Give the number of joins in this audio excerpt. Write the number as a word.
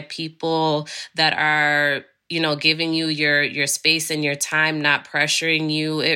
zero